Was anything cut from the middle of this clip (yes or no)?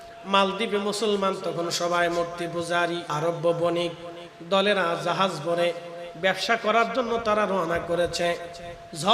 yes